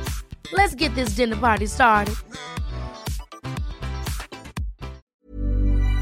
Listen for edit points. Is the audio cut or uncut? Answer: cut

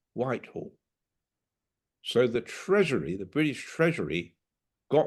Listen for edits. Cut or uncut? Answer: uncut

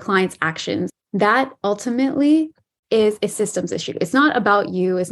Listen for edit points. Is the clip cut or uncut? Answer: cut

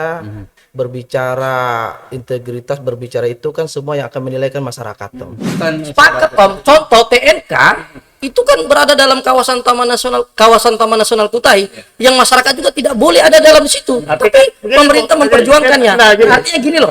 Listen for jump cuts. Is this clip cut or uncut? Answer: cut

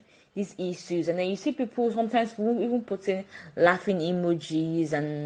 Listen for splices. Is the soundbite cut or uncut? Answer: uncut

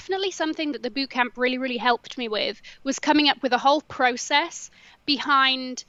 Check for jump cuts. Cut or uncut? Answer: uncut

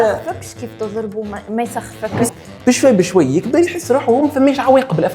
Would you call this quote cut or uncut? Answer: cut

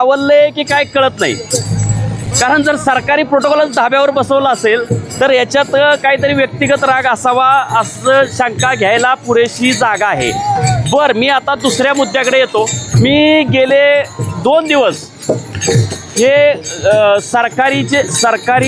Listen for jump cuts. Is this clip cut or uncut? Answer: uncut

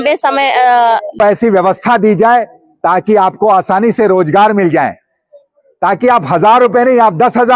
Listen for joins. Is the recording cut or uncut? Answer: cut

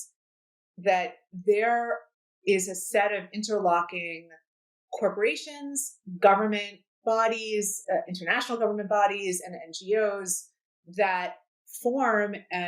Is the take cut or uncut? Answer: cut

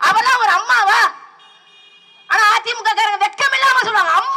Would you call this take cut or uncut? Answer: uncut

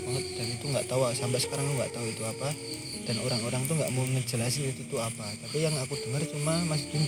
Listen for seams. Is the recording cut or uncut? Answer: uncut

